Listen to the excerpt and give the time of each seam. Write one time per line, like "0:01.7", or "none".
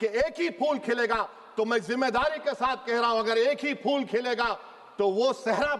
none